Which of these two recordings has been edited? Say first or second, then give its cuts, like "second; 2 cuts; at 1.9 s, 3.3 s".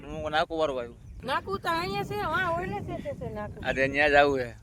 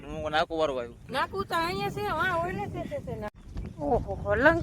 second; 2 cuts; at 1.0 s, 3.3 s